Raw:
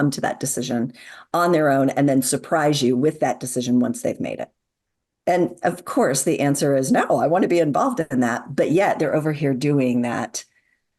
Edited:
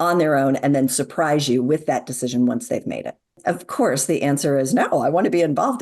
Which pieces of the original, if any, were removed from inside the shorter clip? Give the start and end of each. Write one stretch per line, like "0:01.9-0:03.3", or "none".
0:04.7-0:05.5